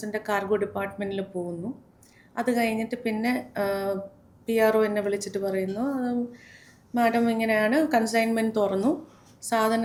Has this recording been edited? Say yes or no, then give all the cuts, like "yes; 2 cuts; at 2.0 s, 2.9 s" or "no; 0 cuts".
no; 0 cuts